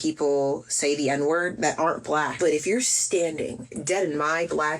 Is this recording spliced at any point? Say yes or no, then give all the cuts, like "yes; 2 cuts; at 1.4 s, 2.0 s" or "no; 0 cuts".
yes; 2 cuts; at 2.3 s, 3.7 s